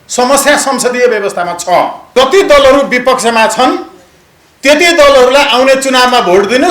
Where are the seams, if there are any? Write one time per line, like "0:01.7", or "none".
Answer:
0:02.1